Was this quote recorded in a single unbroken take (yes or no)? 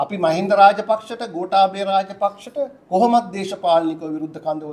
yes